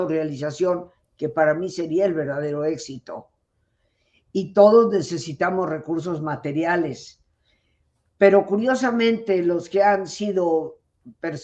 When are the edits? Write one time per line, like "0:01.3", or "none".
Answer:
none